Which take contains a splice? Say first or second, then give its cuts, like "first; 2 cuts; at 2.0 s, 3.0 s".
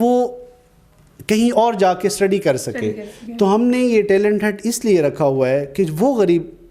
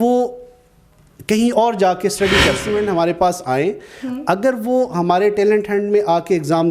second; 1 cut; at 2.6 s